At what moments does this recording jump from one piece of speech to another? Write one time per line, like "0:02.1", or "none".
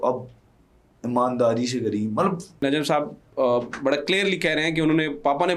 0:02.6